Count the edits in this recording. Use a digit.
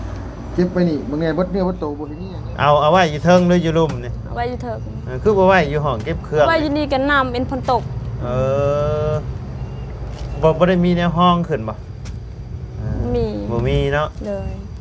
1